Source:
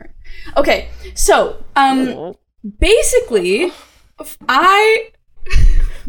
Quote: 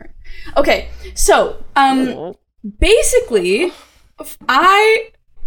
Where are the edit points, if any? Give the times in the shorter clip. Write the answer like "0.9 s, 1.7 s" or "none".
none